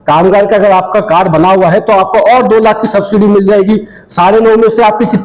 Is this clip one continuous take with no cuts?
yes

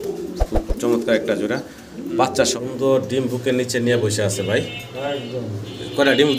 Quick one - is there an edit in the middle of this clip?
yes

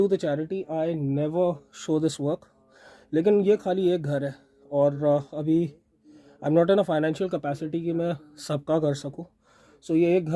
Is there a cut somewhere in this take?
no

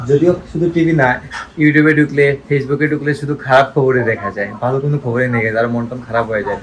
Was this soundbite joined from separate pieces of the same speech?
no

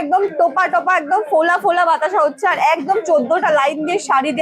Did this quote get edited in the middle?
no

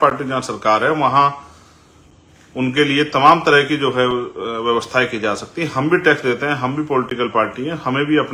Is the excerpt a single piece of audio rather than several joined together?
yes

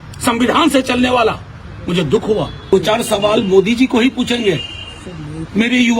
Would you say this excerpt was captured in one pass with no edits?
no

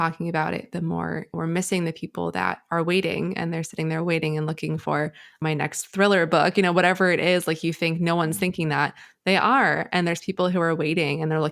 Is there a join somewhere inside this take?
yes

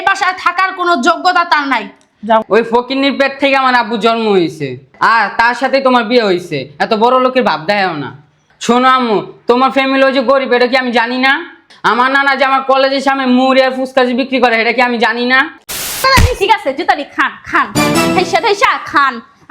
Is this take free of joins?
no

